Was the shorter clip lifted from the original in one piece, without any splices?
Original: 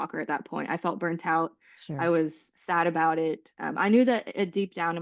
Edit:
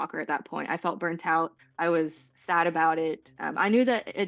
no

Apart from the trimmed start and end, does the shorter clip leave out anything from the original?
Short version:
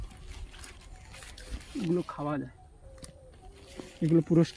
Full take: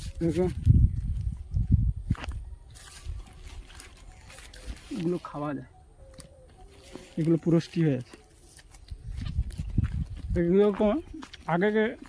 no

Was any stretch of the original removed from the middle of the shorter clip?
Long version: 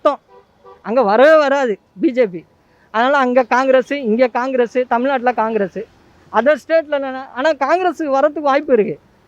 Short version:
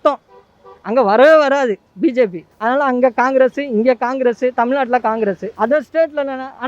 yes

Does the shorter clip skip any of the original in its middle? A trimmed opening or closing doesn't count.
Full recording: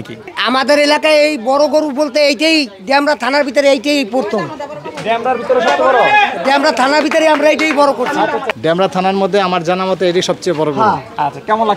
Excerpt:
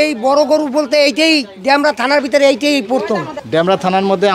yes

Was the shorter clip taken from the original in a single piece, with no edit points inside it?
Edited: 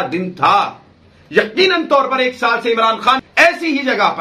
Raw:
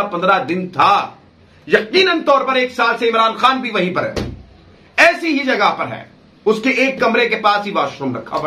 no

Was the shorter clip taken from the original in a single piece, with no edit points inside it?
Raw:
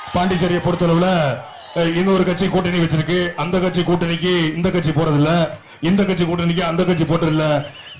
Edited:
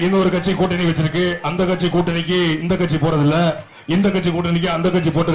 yes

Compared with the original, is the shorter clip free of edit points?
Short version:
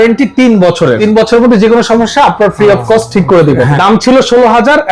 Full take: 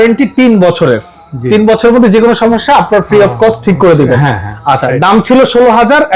no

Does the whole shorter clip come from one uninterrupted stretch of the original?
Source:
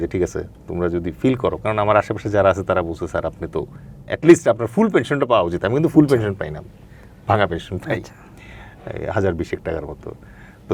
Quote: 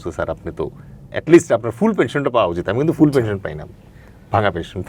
yes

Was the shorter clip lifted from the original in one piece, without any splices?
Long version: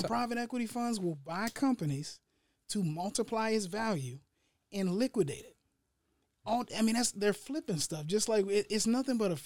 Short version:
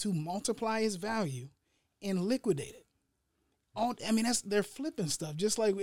yes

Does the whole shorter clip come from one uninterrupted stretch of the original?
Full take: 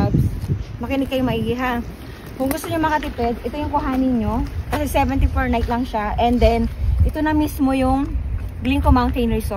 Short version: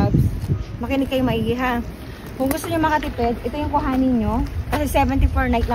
yes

